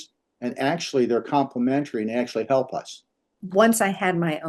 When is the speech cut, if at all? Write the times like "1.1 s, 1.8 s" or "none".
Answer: 3.4 s